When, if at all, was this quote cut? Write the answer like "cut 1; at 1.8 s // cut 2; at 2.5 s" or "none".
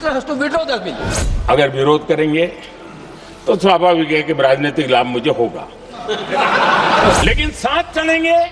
cut 1; at 1.2 s // cut 2; at 7.2 s